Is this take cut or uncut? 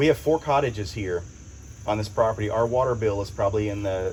uncut